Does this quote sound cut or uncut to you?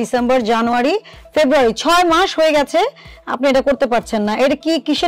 uncut